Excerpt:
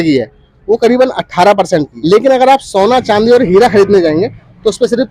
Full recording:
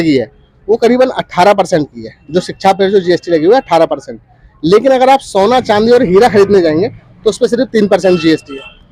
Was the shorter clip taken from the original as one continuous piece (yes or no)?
no